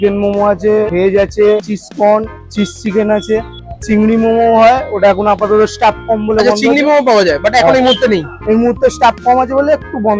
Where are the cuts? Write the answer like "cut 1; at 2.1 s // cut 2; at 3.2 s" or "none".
none